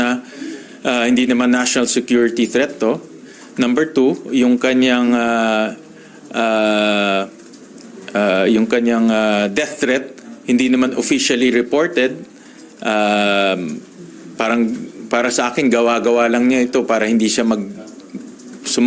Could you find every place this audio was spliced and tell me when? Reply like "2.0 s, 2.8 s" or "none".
none